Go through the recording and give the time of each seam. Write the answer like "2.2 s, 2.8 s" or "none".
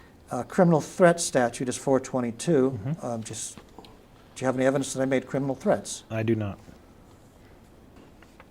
none